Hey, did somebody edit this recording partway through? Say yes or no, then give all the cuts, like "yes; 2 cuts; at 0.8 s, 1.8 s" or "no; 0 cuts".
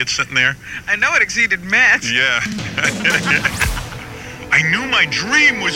no; 0 cuts